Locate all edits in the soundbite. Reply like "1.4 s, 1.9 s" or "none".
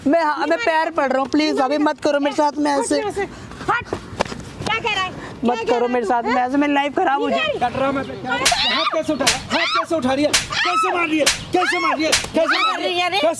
7.3 s